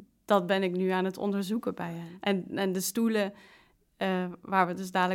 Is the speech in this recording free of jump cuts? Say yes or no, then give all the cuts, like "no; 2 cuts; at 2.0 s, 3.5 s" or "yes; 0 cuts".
no; 1 cut; at 2.1 s